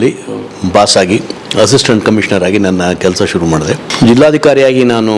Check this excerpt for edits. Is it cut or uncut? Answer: cut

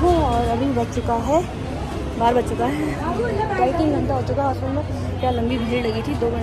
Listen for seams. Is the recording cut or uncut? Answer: uncut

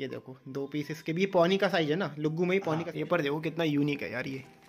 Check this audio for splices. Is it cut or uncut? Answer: cut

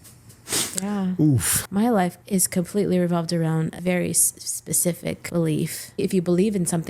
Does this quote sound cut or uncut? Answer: cut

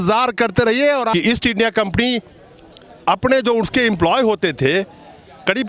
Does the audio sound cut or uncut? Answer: cut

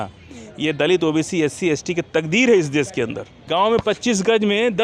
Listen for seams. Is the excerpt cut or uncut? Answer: cut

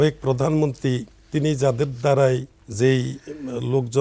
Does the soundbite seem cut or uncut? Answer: cut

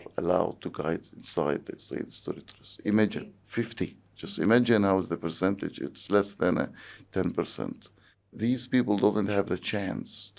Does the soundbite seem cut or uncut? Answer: cut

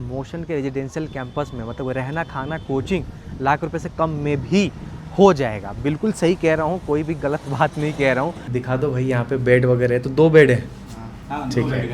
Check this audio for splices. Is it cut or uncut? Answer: cut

